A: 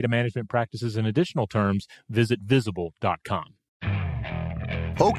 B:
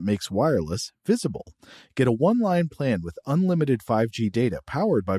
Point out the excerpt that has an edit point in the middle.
A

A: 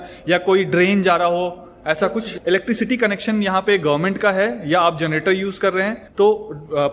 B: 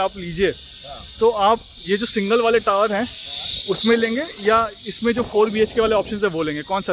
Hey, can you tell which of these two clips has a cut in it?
A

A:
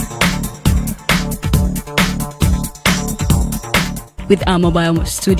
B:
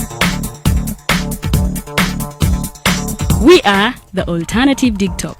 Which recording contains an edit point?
A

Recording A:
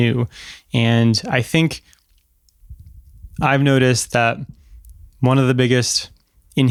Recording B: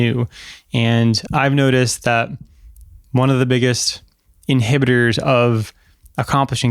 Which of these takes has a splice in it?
B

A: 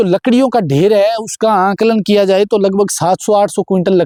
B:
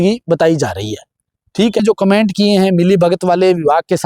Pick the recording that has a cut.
B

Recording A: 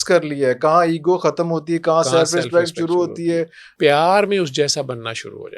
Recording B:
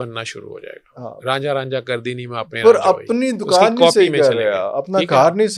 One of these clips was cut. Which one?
A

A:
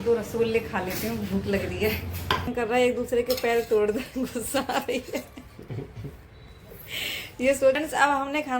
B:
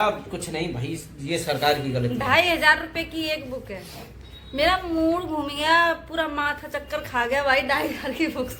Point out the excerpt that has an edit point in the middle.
A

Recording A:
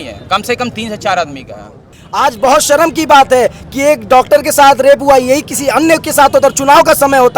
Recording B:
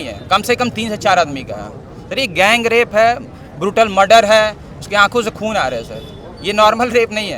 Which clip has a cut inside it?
A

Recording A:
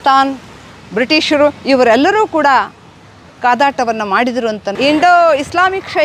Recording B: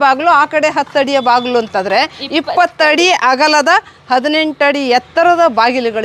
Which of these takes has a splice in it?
A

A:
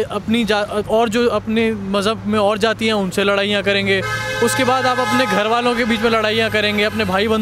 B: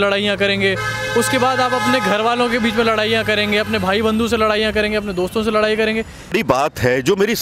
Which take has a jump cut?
B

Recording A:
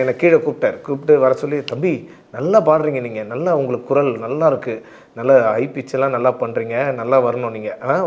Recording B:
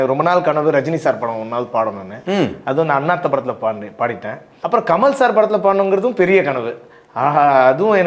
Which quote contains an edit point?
B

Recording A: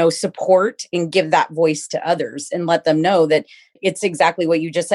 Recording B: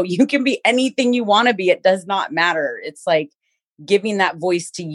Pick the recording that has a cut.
A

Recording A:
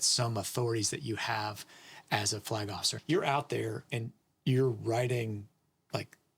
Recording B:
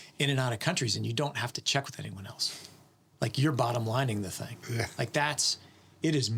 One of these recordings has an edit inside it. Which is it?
A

